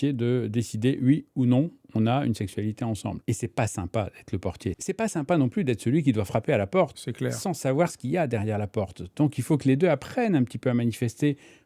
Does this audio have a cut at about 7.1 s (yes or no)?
no